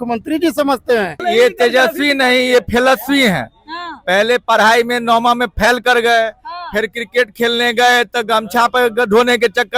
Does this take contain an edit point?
yes; 1 cut; at 1.2 s

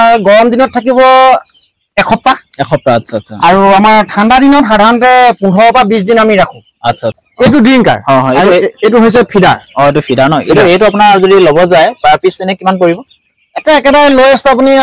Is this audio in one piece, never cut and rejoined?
no; 1 cut; at 7.2 s

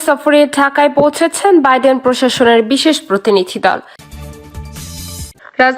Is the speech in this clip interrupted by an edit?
yes; 1 cut; at 4.0 s

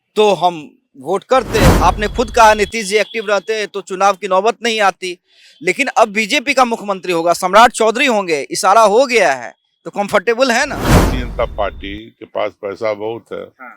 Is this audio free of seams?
no; 2 cuts; at 1.7 s, 10.9 s

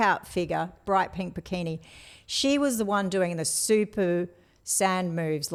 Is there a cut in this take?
no; 0 cuts

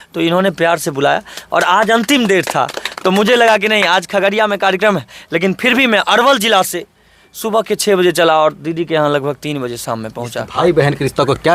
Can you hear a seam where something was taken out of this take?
yes; 1 cut; at 10.3 s

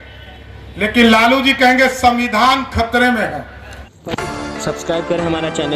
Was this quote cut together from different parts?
yes; 1 cut; at 4.0 s

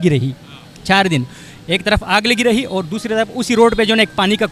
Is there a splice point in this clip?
no; 0 cuts

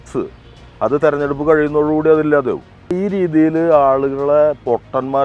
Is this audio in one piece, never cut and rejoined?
no; 1 cut; at 2.9 s

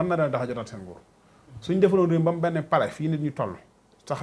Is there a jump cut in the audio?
no; 0 cuts

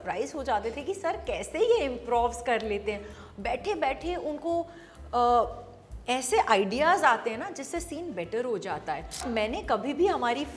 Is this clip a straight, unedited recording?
no; 1 cut; at 9.2 s

